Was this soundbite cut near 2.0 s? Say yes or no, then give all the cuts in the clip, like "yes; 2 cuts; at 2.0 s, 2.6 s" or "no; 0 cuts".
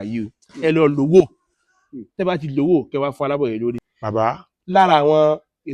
no; 1 cut; at 3.8 s